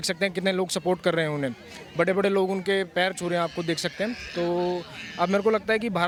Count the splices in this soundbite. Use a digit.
0